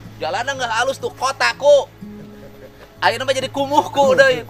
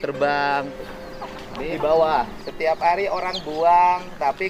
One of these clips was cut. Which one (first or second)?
second